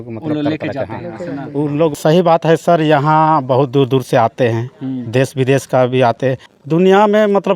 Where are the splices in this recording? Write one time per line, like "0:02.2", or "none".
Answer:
0:02.0
0:06.5